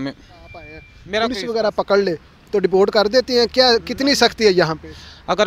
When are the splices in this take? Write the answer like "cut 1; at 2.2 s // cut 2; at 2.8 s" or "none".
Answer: cut 1; at 1.0 s